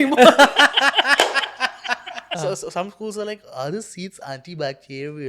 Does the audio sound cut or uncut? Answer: cut